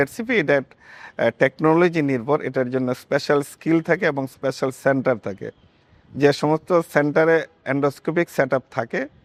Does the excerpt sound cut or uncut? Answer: uncut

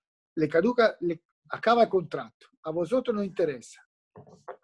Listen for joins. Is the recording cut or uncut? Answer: uncut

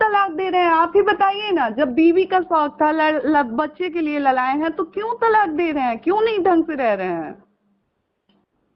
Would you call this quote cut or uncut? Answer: uncut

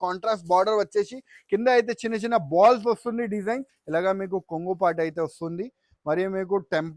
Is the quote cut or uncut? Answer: cut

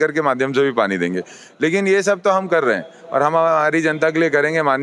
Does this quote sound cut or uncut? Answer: uncut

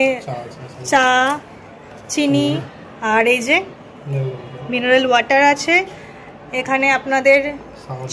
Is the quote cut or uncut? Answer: uncut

